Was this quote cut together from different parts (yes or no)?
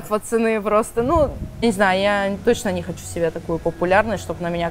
yes